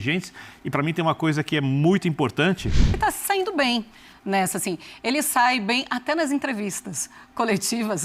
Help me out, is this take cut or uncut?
cut